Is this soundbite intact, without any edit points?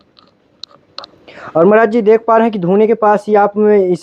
yes; 0 cuts

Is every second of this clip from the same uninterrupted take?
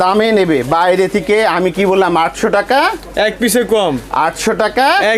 yes; 0 cuts

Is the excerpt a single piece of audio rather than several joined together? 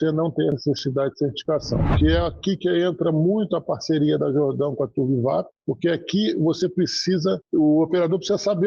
no; 1 cut; at 1.9 s

